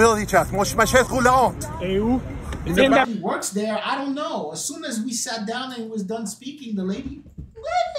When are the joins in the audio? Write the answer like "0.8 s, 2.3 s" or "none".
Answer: 3.1 s